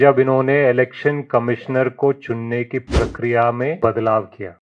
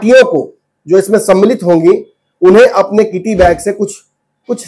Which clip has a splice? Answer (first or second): first